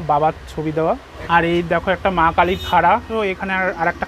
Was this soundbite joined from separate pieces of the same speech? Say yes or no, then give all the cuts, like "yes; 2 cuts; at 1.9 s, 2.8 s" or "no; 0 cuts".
yes; 2 cuts; at 1.1 s, 3.1 s